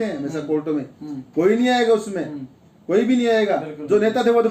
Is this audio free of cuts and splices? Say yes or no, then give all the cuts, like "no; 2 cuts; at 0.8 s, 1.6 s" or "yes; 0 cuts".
yes; 0 cuts